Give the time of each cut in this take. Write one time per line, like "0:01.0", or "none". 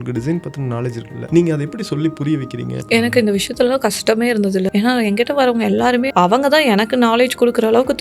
0:01.1
0:02.7
0:04.7
0:06.1